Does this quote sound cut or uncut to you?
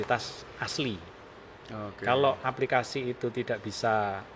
uncut